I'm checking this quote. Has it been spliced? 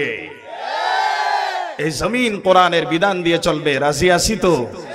no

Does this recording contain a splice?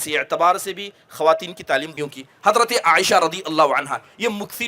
yes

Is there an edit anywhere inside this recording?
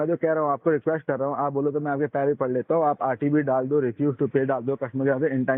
no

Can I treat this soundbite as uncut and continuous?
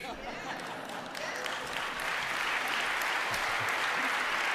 yes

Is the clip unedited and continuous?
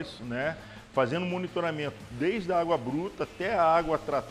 yes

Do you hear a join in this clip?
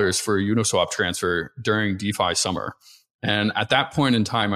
no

